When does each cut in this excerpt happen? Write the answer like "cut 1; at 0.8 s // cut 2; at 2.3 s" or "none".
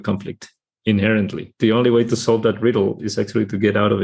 cut 1; at 1.6 s